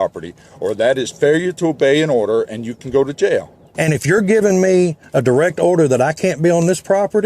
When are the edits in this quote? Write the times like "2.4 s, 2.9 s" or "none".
3.6 s